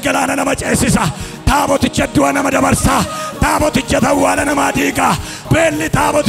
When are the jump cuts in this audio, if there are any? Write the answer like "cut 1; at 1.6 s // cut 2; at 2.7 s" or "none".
cut 1; at 5.3 s